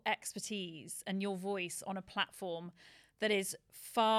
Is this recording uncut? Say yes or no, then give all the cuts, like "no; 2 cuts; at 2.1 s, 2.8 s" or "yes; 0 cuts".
yes; 0 cuts